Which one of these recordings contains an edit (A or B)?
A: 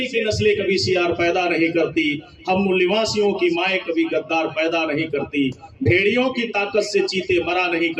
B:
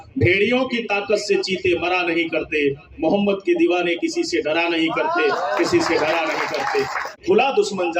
B